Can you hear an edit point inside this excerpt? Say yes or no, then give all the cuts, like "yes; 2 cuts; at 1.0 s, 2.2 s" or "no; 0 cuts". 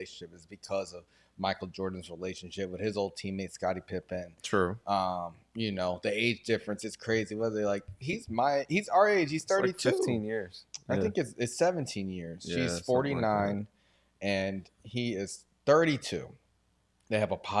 no; 0 cuts